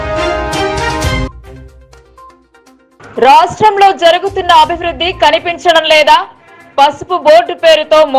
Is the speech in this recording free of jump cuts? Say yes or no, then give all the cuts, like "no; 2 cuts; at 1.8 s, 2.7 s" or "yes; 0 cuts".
yes; 0 cuts